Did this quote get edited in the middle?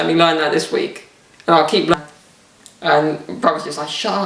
yes; 1 cut; at 1.9 s

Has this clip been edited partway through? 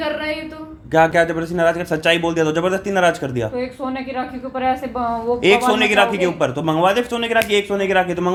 no; 0 cuts

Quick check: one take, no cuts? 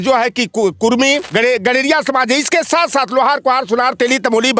no; 1 cut; at 1.2 s

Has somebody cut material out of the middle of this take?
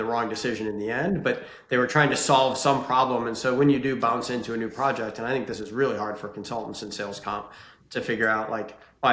no; 0 cuts

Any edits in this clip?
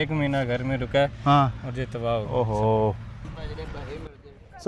no; 0 cuts

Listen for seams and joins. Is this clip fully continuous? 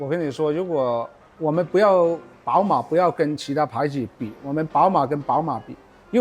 no; 1 cut; at 2.3 s

